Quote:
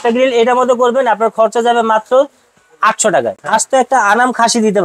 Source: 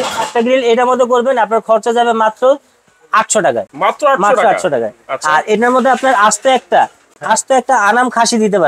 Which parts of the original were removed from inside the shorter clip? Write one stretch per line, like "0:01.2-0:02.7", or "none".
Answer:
0:03.7-0:07.1